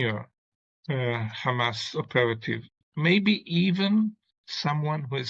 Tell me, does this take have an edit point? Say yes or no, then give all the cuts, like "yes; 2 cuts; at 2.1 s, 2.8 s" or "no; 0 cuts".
no; 0 cuts